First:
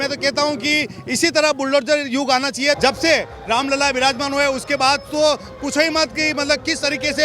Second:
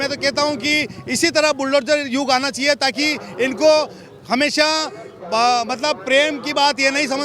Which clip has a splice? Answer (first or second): first